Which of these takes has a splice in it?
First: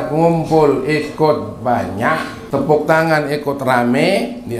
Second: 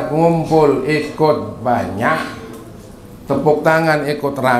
first; 1 cut; at 2.3 s

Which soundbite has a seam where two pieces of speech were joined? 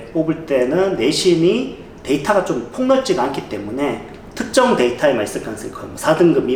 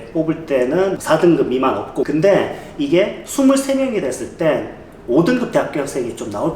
second; 2 cuts; at 1.0 s, 2.1 s

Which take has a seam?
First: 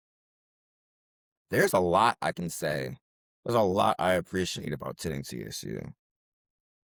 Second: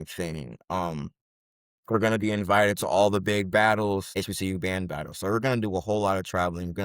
second; 1 cut; at 4.1 s

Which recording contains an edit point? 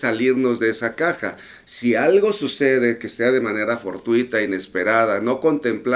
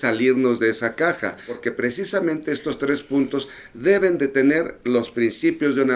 second; 1 cut; at 1.6 s

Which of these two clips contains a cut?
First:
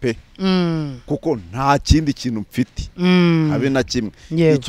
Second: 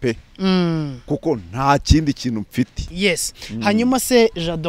second; 1 cut; at 2.8 s

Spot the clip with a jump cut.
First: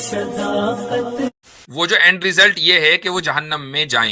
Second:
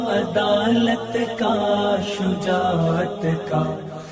first; 1 cut; at 1.3 s

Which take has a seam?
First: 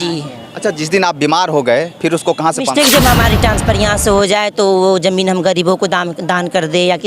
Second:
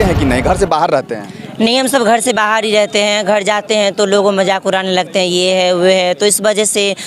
first; 1 cut; at 2.7 s

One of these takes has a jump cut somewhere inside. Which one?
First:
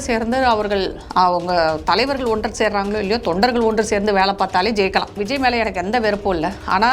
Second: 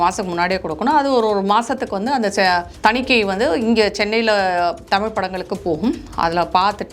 first; 2 cuts; at 1.0 s, 5.1 s

